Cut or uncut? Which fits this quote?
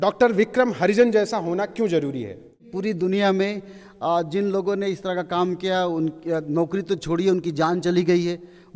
cut